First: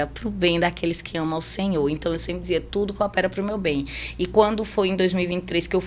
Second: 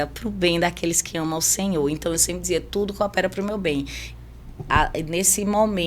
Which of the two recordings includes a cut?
second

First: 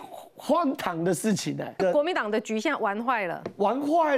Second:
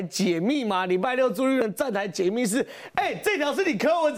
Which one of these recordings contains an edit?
first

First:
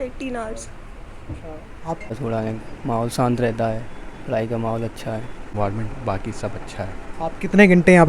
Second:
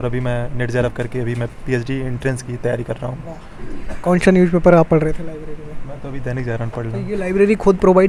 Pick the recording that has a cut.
first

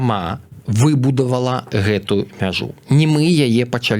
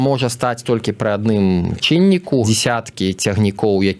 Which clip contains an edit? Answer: second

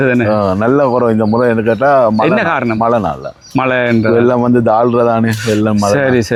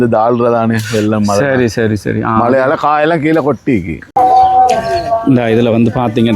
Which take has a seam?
second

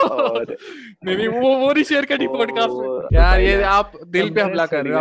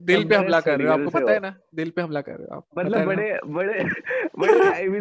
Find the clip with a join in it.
first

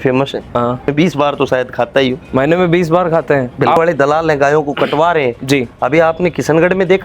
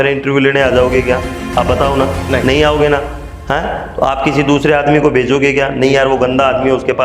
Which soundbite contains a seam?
first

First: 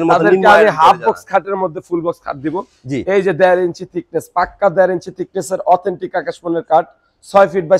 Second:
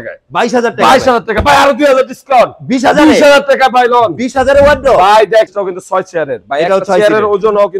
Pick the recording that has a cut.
second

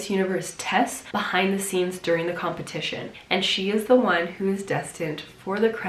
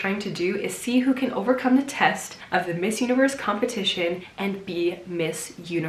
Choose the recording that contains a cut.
first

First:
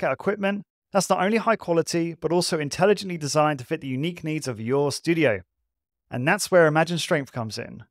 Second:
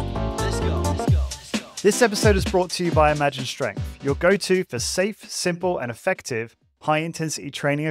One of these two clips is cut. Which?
second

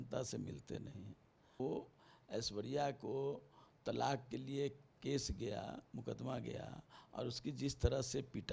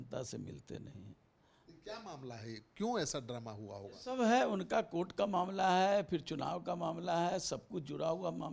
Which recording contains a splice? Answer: first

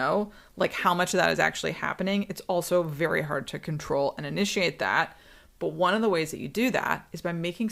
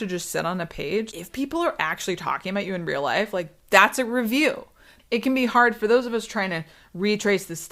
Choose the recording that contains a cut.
second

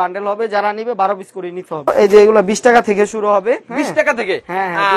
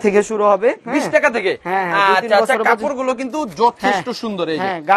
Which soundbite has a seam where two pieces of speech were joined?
first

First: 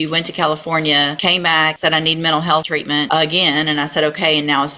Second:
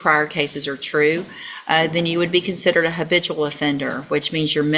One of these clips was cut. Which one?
first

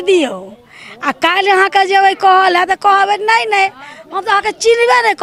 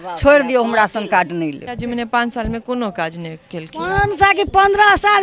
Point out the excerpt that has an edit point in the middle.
second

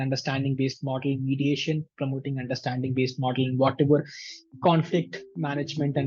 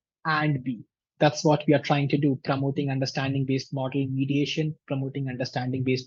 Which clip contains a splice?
second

